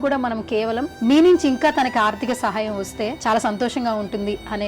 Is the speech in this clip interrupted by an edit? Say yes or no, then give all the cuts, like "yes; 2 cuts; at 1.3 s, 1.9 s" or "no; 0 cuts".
yes; 2 cuts; at 0.9 s, 3.2 s